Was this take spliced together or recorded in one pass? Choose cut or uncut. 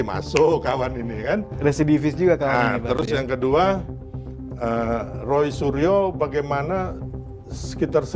uncut